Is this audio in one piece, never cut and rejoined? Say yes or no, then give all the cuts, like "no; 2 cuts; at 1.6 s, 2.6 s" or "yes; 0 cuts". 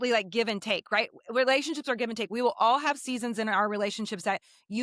yes; 0 cuts